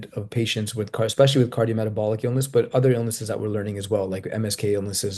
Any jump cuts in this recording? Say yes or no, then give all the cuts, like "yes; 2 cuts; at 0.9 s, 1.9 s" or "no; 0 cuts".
no; 0 cuts